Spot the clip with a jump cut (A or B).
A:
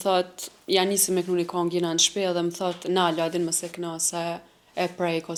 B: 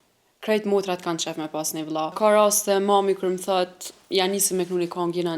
B